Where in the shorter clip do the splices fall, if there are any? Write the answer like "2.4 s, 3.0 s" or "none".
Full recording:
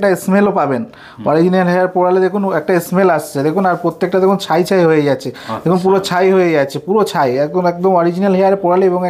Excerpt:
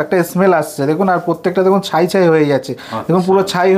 none